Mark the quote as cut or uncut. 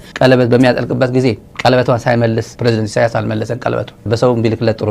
cut